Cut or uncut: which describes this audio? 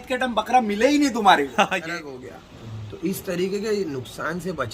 cut